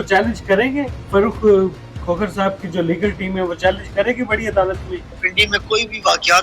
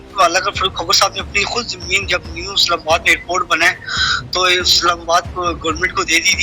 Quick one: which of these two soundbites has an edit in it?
first; 1 cut; at 5.2 s

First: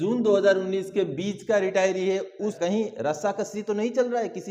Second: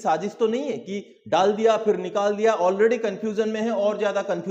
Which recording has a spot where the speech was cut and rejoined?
first; 1 cut; at 2.6 s

